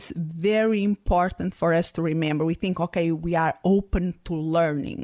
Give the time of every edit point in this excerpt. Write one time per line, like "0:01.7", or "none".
none